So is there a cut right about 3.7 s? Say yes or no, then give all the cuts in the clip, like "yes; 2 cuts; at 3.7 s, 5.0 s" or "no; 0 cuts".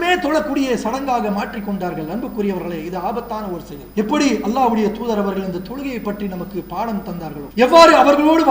yes; 2 cuts; at 3.7 s, 7.4 s